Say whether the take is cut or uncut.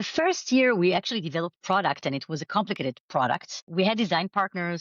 cut